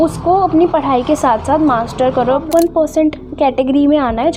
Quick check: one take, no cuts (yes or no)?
no